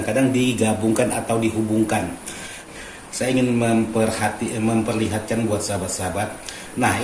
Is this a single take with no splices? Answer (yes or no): no